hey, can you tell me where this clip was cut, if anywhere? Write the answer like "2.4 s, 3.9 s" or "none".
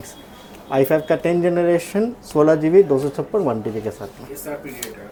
none